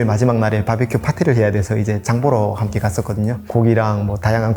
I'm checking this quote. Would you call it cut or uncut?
cut